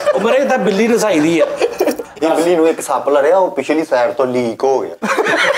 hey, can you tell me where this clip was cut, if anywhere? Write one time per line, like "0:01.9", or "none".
0:02.1